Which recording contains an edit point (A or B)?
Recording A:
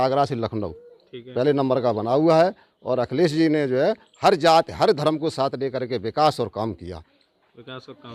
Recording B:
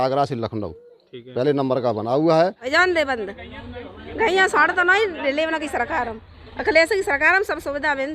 B